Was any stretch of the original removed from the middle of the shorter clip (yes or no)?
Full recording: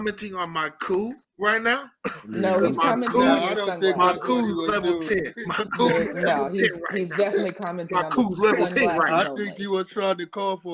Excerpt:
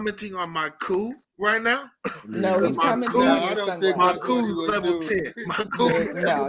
no